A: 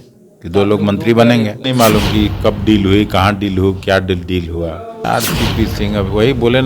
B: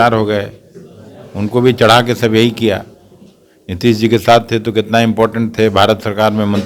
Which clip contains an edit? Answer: A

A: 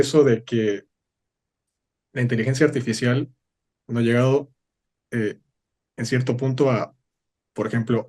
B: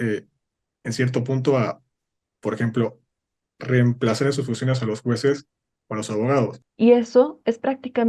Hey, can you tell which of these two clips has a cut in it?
B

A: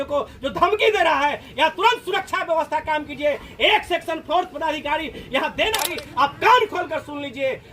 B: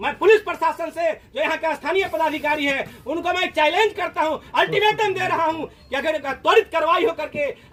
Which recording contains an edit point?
A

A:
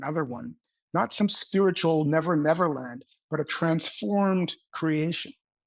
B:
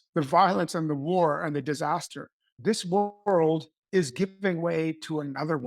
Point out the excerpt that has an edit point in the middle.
B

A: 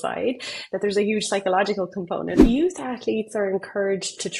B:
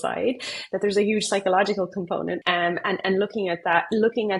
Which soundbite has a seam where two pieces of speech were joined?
A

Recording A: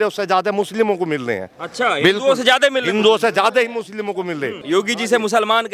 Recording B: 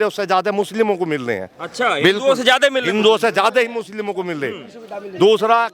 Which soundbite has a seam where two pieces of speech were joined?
A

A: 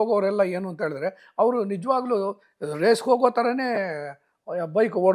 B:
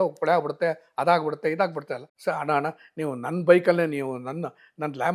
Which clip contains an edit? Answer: B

